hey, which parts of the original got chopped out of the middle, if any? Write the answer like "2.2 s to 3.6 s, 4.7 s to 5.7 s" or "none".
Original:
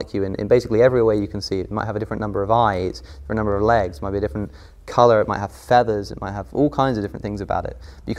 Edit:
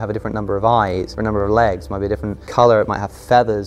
3.0 s to 3.2 s, 4.5 s to 4.8 s